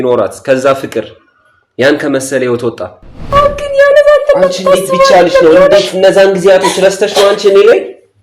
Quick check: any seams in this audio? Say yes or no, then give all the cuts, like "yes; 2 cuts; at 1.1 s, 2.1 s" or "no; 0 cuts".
yes; 1 cut; at 3.2 s